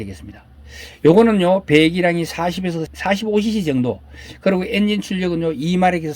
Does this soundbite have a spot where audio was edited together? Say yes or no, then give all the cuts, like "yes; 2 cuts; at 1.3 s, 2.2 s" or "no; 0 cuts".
yes; 1 cut; at 2.9 s